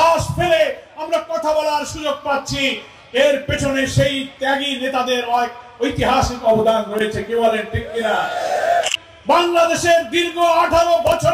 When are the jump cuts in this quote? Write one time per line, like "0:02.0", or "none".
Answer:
0:08.9